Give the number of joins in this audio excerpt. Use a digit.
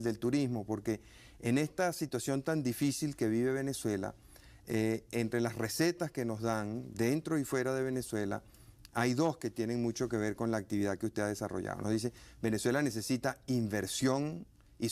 1